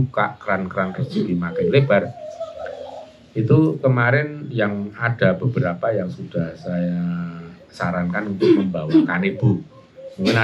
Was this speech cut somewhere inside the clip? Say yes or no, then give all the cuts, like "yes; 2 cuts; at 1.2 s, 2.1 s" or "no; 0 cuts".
no; 0 cuts